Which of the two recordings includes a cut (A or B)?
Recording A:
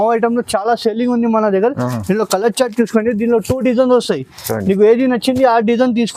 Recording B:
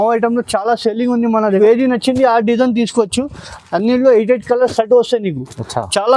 B